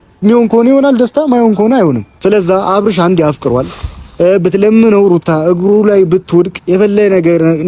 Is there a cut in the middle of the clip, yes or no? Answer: yes